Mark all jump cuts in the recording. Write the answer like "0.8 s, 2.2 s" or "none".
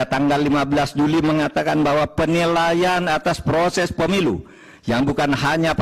none